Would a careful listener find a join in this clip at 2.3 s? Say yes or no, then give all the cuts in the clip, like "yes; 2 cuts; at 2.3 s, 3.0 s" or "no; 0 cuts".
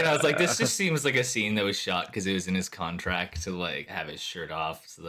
no; 1 cut; at 3.8 s